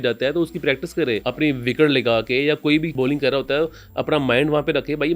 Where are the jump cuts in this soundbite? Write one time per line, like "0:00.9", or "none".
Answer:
0:01.3
0:02.9